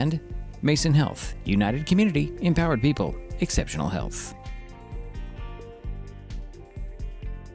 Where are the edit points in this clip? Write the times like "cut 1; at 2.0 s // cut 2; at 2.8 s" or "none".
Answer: cut 1; at 4.1 s